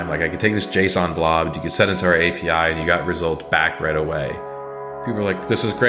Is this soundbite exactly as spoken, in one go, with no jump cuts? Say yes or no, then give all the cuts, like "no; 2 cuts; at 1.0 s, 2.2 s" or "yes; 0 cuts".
no; 1 cut; at 4.9 s